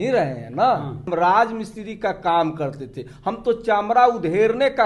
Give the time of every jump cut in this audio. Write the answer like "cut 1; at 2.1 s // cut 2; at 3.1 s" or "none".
cut 1; at 1.1 s